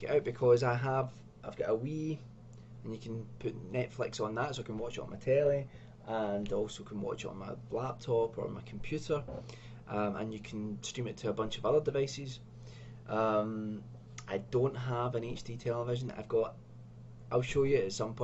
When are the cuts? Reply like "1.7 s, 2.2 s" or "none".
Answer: 1.6 s